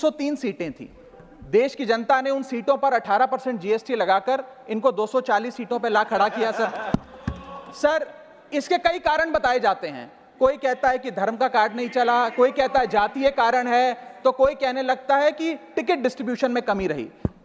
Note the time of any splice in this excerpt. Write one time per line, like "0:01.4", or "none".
none